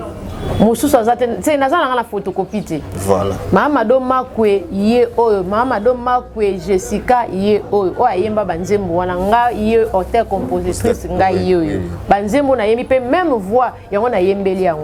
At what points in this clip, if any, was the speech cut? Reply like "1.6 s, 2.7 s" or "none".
none